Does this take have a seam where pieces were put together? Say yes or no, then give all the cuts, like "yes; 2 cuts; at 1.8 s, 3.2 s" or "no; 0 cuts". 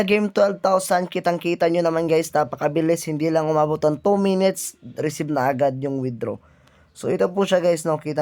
no; 0 cuts